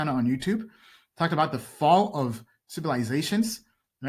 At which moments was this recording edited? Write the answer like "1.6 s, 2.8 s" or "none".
none